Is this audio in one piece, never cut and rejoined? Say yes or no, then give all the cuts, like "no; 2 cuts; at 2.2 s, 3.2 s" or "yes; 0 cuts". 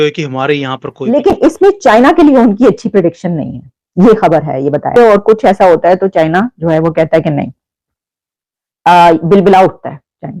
no; 1 cut; at 0.9 s